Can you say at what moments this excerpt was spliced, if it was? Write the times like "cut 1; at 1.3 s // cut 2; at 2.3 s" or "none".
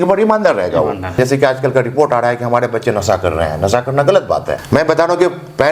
cut 1; at 1.2 s // cut 2; at 4.5 s

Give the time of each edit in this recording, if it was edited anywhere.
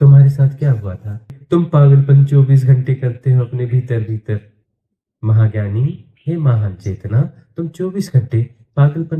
cut 1; at 1.4 s

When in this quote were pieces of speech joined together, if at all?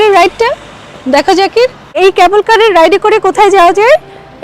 cut 1; at 1.9 s

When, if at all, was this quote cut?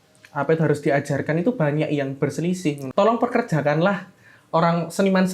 cut 1; at 2.8 s

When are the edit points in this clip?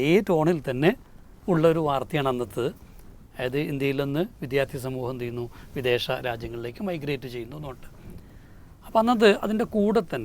none

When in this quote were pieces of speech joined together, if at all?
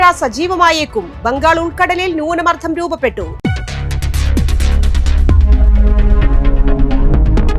none

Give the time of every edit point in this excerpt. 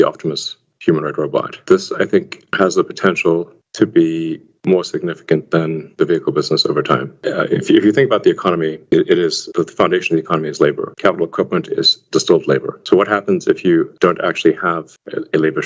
none

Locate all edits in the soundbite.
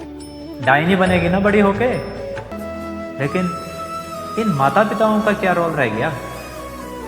cut 1; at 2.6 s

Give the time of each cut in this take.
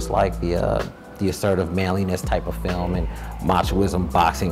none

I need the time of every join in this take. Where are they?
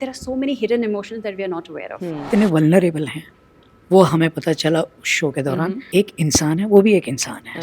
cut 1; at 2.3 s // cut 2; at 5.8 s

